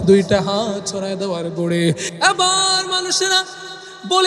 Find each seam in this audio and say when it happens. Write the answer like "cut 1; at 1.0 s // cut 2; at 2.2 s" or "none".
cut 1; at 2.0 s